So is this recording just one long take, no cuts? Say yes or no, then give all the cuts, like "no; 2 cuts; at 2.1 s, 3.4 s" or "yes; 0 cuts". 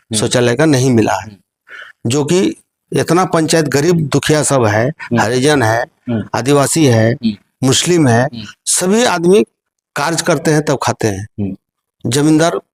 yes; 0 cuts